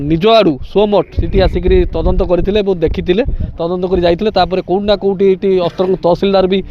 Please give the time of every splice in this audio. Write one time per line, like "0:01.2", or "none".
none